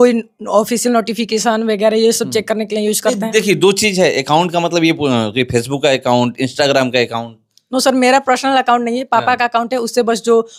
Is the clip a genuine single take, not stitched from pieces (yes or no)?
yes